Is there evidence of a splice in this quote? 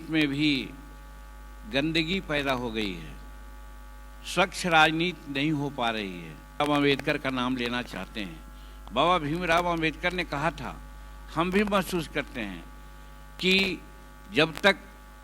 yes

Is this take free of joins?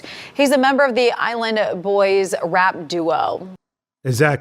no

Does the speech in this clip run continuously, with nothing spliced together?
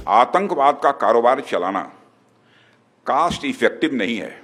yes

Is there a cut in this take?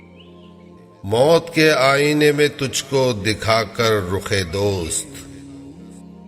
yes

